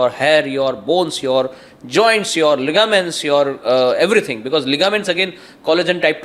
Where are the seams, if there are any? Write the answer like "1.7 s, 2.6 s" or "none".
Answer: none